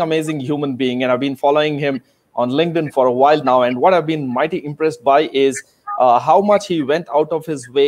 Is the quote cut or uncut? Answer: uncut